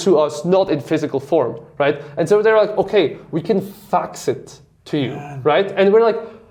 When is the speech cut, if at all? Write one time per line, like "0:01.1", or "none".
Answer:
none

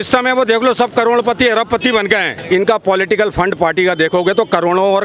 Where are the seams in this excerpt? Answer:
0:02.3

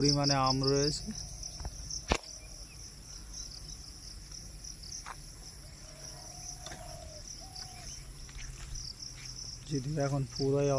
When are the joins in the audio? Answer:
none

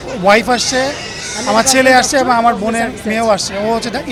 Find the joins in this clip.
none

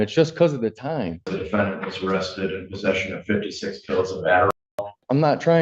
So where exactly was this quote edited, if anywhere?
0:01.4
0:04.5

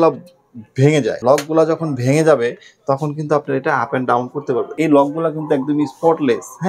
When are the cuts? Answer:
0:01.2
0:04.7

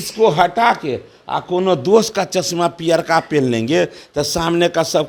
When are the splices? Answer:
none

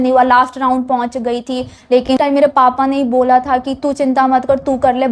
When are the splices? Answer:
0:02.1

